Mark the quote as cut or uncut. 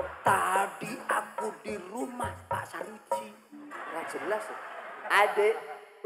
uncut